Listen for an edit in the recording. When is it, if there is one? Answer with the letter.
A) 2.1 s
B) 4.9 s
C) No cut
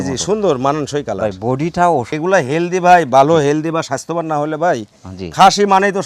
A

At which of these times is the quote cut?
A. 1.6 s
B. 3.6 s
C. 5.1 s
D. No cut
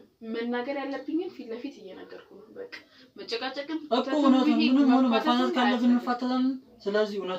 D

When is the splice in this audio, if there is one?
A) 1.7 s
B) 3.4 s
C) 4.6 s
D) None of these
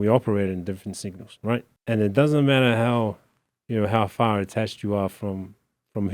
A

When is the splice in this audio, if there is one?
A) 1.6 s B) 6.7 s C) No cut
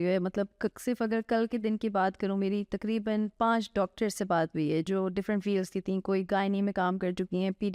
C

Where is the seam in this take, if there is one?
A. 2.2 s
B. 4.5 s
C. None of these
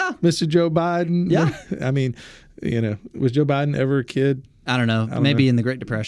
C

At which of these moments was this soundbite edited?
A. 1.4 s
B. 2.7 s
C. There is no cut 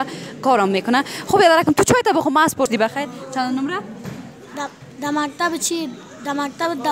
B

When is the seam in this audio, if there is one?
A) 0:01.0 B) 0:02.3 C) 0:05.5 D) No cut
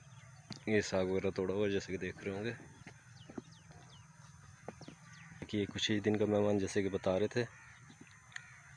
C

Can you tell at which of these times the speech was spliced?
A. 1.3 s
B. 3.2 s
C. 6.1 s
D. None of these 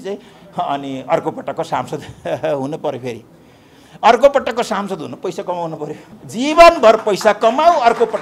C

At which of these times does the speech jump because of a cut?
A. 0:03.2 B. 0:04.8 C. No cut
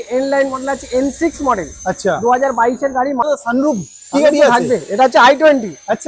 A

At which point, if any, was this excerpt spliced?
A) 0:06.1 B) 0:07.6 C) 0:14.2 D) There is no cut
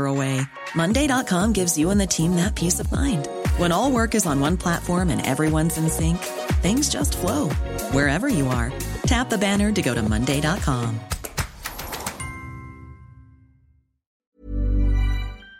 C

